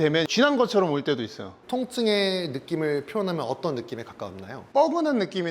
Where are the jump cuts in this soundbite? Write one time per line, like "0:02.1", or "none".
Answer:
0:01.6